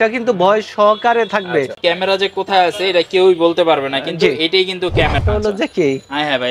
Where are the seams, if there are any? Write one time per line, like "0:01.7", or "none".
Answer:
0:01.8
0:05.2